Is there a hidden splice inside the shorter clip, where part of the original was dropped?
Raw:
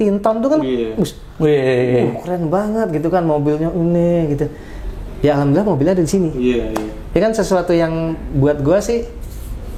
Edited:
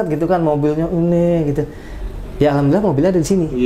no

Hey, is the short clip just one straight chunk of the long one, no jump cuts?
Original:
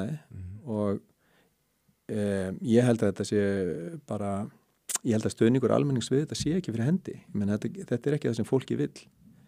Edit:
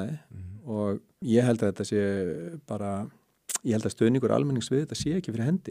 no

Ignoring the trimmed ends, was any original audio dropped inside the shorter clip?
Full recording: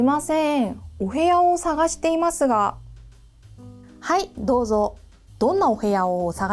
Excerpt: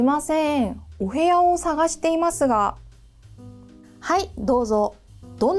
no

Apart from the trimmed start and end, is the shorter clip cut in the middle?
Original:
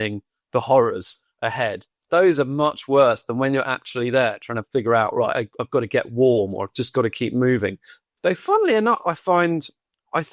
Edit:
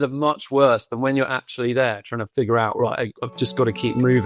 yes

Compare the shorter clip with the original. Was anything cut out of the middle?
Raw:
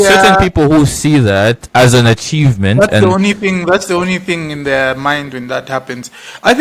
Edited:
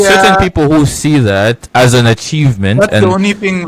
no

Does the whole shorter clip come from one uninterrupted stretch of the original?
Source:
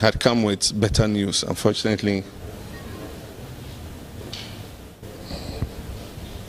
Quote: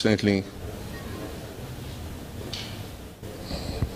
yes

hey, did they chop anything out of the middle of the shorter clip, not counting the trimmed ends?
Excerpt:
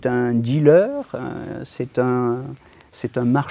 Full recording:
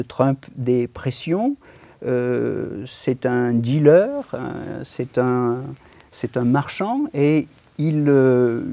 no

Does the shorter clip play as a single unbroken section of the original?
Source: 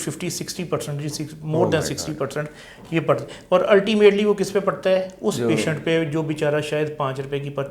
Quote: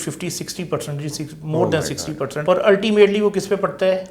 no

